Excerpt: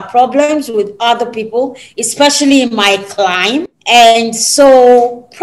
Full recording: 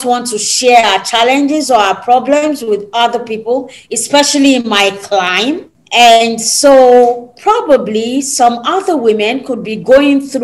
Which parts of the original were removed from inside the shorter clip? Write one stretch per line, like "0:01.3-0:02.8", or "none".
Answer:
0:05.7-0:05.8